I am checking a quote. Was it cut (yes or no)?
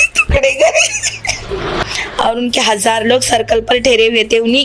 yes